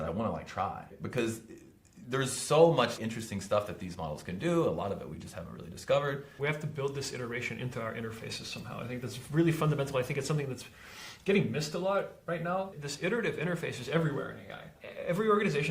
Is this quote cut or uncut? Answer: cut